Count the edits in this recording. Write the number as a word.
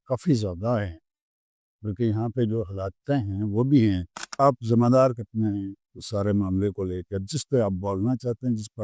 one